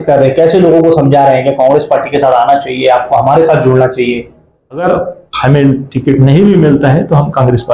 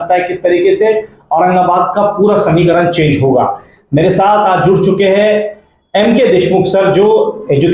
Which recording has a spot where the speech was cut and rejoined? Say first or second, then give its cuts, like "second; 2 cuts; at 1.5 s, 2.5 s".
first; 1 cut; at 4.8 s